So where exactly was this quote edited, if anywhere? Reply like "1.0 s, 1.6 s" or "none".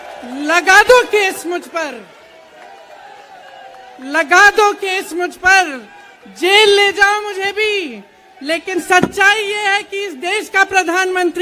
none

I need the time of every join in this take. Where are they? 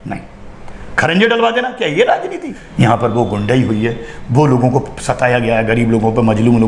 2.6 s

